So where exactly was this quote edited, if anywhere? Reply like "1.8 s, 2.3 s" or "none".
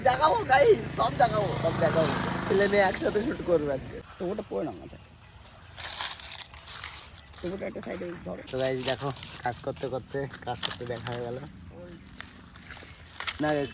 4.0 s, 8.4 s